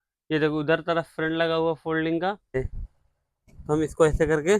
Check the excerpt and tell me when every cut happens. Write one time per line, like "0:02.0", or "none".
0:02.6